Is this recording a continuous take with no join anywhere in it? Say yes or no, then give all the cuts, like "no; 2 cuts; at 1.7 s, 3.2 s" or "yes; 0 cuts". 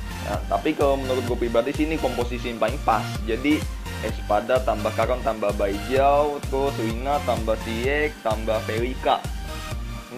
no; 1 cut; at 4.1 s